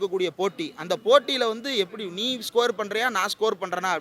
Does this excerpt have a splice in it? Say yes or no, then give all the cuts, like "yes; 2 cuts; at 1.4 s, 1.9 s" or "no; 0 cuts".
no; 0 cuts